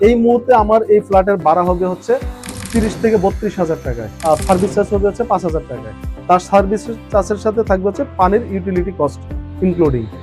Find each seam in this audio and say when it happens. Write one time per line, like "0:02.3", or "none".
none